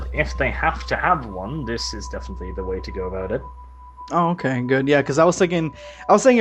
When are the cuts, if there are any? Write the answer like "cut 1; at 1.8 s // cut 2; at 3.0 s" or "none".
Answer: cut 1; at 2.3 s